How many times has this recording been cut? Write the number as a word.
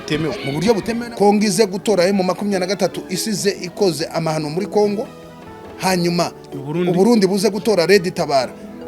one